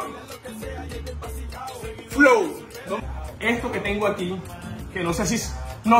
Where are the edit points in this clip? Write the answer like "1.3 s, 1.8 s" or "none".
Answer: 3.0 s